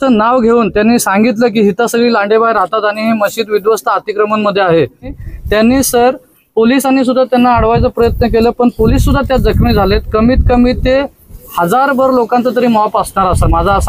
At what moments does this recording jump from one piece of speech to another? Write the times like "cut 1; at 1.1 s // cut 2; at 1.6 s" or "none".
cut 1; at 5.2 s